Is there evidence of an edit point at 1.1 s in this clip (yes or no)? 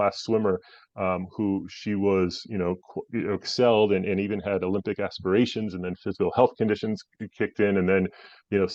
no